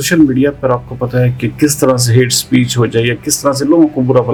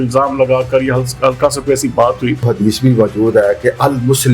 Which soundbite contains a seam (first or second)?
second